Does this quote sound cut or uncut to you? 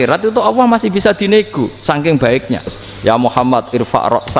cut